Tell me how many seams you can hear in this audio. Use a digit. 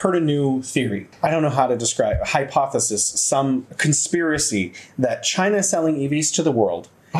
1